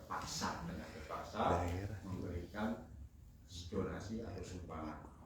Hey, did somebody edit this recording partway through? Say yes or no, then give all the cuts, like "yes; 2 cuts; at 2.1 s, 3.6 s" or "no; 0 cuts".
no; 0 cuts